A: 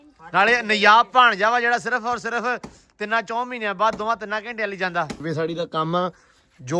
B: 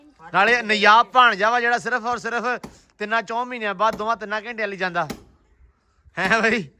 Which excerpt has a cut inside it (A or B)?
A